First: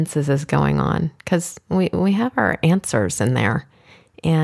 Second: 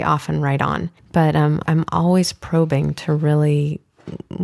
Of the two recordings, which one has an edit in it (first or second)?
second